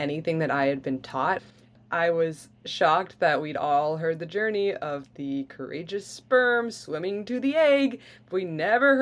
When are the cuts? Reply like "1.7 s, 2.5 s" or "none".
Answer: 1.7 s